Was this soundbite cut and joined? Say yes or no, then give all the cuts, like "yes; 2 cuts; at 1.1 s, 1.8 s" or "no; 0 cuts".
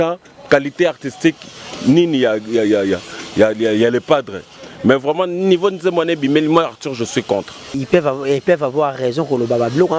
yes; 1 cut; at 7.8 s